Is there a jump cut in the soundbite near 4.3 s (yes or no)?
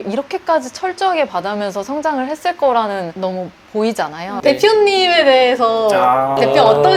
yes